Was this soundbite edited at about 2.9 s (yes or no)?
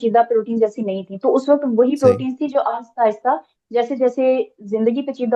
no